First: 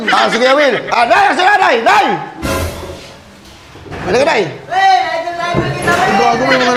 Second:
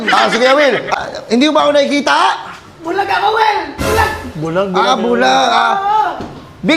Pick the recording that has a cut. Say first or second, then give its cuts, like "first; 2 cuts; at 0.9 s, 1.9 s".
second; 1 cut; at 0.9 s